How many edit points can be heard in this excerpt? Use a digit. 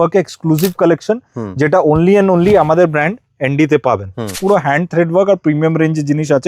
1